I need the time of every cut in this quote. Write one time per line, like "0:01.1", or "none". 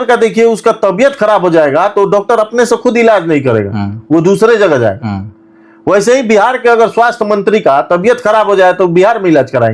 none